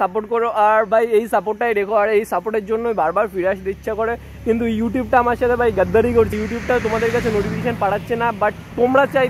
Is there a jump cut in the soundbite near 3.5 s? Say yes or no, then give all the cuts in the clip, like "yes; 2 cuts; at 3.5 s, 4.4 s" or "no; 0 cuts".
no; 1 cut; at 6.4 s